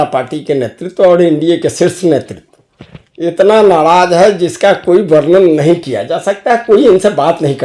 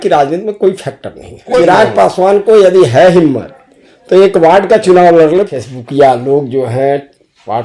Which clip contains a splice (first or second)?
second